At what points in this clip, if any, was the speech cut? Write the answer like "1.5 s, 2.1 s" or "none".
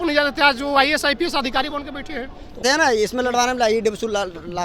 2.6 s